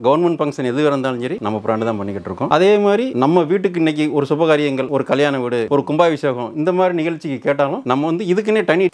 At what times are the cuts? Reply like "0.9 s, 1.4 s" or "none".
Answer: none